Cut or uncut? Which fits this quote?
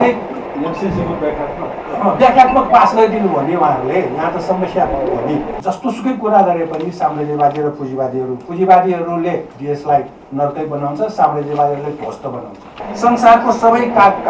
cut